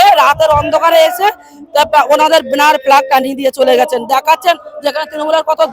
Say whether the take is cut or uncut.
uncut